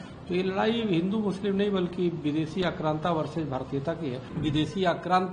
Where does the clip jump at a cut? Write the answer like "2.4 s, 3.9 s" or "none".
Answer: 4.3 s